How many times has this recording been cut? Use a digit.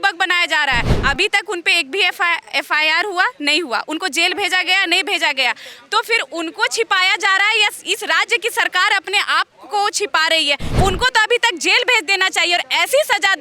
2